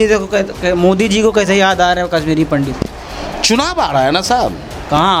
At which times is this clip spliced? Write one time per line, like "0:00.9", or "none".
none